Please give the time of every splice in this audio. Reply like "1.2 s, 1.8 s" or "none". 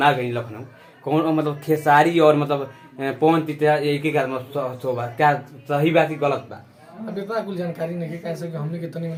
none